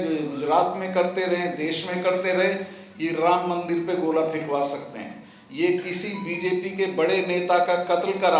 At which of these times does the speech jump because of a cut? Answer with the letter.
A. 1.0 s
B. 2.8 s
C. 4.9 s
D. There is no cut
D